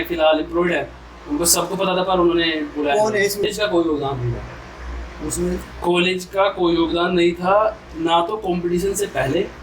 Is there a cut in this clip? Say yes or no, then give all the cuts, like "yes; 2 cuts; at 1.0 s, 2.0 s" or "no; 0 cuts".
yes; 1 cut; at 3.5 s